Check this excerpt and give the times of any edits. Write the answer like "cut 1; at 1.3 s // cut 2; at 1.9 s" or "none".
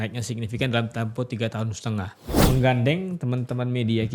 cut 1; at 2.4 s